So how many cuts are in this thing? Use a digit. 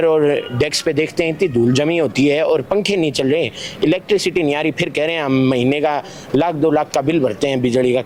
0